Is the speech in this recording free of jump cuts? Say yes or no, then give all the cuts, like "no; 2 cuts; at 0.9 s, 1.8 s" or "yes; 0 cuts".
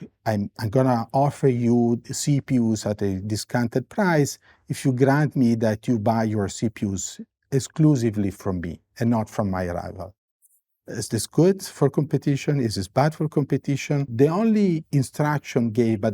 no; 1 cut; at 14.1 s